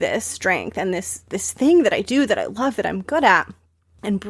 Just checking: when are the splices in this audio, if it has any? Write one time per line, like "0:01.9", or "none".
0:01.2